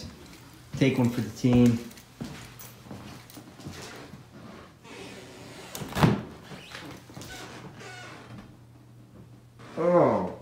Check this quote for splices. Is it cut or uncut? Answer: uncut